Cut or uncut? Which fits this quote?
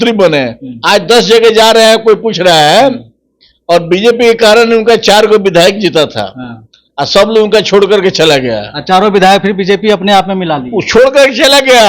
uncut